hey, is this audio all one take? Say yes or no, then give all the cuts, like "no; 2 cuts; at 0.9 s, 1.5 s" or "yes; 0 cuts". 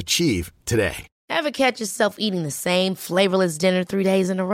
no; 1 cut; at 1.1 s